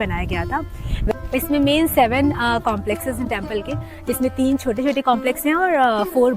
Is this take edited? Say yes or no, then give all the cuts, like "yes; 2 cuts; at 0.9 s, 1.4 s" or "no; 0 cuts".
yes; 1 cut; at 1.1 s